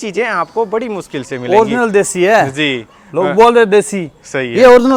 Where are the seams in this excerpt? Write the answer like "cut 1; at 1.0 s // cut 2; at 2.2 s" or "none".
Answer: none